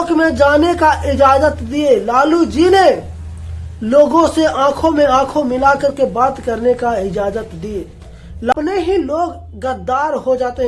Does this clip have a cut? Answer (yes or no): yes